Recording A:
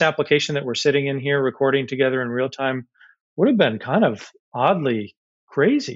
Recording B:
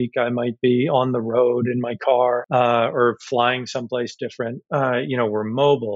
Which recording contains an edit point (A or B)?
B